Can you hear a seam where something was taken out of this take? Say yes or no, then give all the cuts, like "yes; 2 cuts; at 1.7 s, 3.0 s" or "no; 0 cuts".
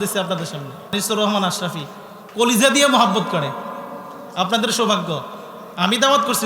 yes; 1 cut; at 0.9 s